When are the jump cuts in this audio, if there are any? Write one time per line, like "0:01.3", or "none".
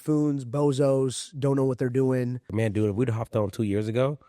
0:02.4